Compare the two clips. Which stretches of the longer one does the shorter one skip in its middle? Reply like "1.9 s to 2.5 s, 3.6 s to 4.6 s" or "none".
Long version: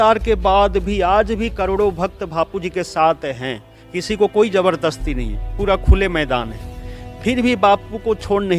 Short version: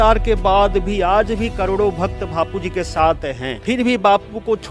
3.5 s to 7.1 s